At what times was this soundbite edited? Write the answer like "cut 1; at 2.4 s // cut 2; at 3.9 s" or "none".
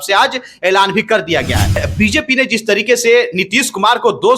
cut 1; at 1.9 s